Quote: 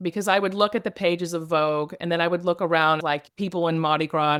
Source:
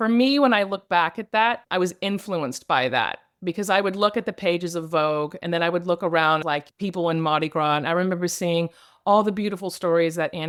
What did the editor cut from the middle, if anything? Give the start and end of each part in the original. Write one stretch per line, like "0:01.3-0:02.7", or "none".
none